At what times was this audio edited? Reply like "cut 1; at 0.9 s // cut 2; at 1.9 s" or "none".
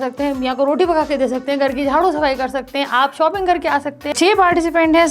cut 1; at 4.1 s